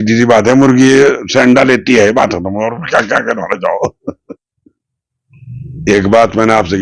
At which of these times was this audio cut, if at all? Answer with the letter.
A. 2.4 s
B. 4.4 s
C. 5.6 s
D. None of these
B